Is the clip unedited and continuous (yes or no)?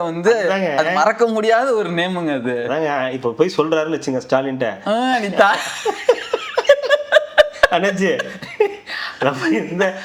yes